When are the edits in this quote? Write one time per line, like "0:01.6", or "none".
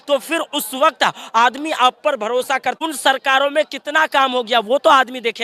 0:02.8